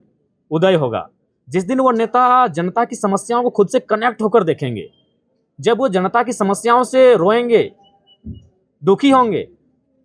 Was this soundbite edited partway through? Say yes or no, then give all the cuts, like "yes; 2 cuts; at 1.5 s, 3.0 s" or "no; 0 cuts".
no; 0 cuts